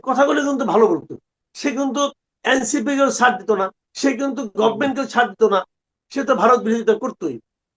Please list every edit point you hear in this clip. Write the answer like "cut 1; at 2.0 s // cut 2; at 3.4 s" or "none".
cut 1; at 1.5 s // cut 2; at 3.8 s